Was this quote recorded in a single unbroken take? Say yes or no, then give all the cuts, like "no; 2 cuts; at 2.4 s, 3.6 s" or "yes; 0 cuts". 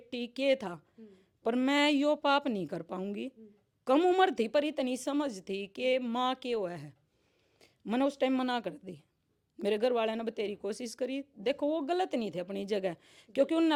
yes; 0 cuts